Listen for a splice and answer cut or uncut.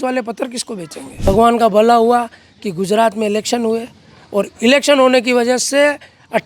cut